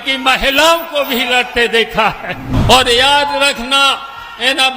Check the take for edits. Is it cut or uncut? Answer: cut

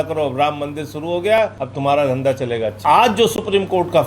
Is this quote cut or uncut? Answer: cut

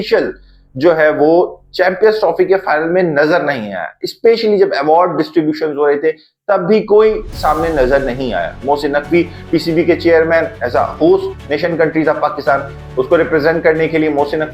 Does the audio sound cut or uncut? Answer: uncut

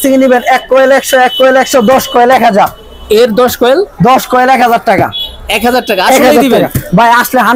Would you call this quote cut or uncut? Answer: uncut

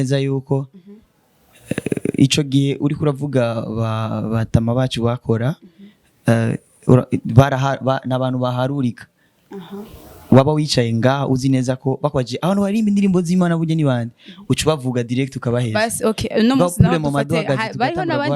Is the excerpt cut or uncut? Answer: uncut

